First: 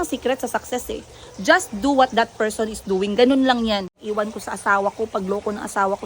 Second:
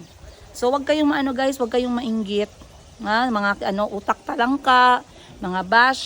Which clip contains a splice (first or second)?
first